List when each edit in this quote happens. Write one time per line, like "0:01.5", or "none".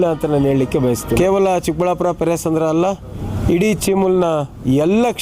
0:01.2